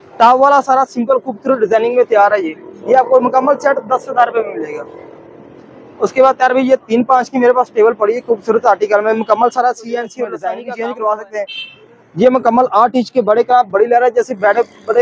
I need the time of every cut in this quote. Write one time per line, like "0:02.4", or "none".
0:10.5